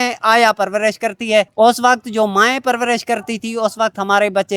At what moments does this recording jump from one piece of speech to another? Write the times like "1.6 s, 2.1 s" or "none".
1.5 s